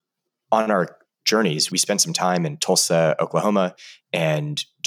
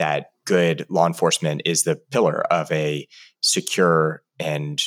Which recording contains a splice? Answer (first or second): first